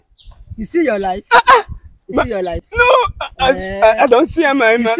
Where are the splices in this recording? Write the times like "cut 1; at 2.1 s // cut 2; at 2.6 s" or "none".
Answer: none